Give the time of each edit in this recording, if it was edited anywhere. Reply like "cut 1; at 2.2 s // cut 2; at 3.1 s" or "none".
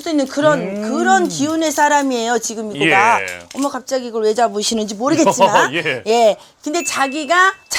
none